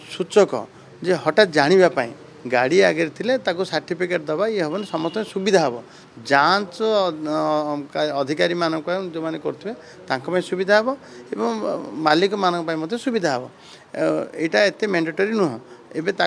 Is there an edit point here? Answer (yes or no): no